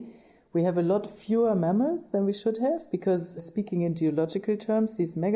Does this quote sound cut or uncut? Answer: cut